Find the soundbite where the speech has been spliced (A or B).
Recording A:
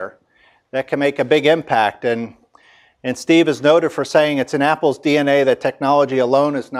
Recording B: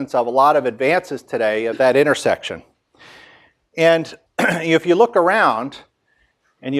B